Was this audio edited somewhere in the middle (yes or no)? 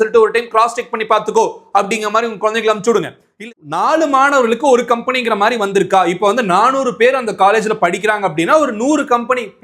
yes